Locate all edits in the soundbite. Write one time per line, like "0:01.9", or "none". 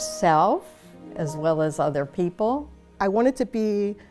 0:02.7